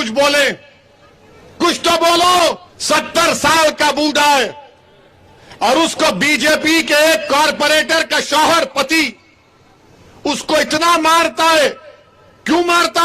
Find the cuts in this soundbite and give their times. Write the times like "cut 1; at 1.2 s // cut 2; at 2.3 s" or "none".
cut 1; at 2.7 s